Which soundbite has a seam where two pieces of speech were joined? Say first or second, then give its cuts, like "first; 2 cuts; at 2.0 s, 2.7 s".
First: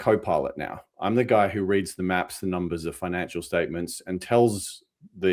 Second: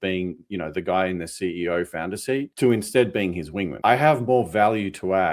second; 2 cuts; at 2.5 s, 3.7 s